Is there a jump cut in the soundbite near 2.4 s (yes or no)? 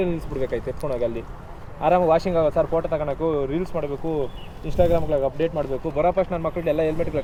no